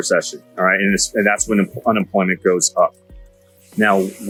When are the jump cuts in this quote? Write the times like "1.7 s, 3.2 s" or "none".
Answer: none